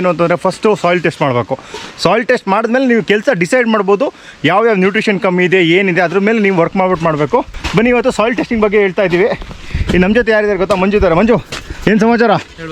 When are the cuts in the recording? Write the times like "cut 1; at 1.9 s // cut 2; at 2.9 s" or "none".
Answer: none